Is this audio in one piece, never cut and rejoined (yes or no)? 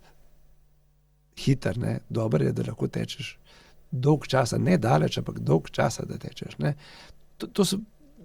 yes